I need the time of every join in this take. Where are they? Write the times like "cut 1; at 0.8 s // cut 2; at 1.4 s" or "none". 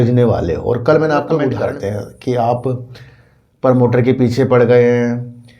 cut 1; at 1.5 s

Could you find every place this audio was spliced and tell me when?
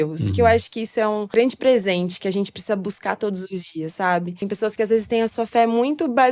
cut 1; at 1.4 s // cut 2; at 4.4 s

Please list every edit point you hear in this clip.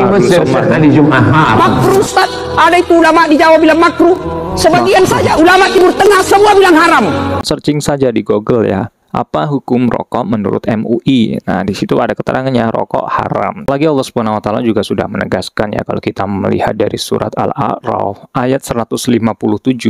cut 1; at 1.7 s // cut 2; at 7.4 s // cut 3; at 13.9 s

